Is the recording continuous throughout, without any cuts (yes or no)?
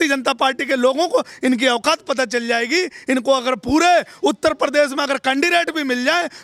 yes